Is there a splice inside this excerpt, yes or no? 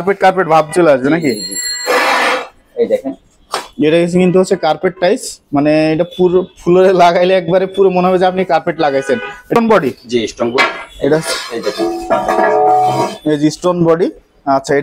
yes